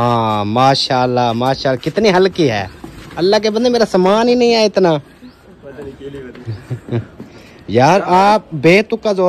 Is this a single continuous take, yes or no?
yes